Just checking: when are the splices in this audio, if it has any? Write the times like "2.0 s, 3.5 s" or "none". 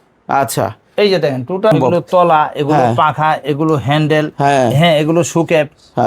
1.7 s